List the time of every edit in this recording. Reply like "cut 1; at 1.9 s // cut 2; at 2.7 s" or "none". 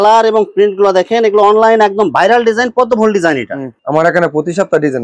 cut 1; at 3.6 s